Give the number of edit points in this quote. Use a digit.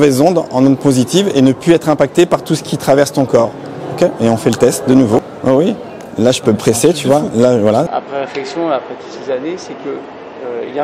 2